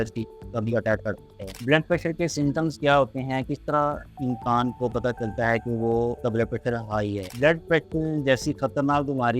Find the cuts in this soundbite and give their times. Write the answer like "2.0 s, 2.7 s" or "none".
1.5 s, 7.3 s